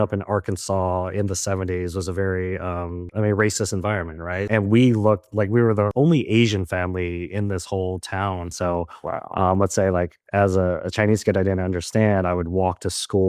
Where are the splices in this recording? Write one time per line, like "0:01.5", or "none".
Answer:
0:04.5
0:08.5

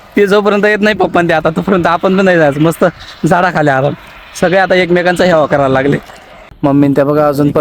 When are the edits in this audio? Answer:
0:06.3

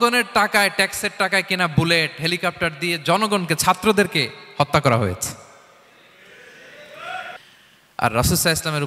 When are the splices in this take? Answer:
0:07.4

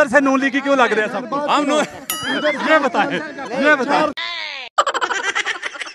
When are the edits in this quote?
none

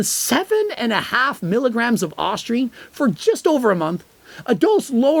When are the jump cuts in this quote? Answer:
none

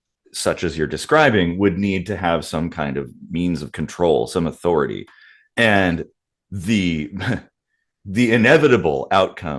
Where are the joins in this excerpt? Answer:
none

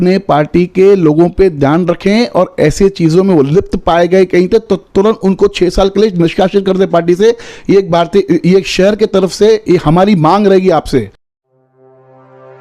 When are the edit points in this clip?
0:11.2

